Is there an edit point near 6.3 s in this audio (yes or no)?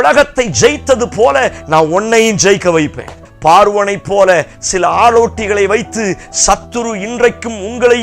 no